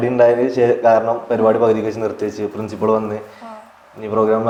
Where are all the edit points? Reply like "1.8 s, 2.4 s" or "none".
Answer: none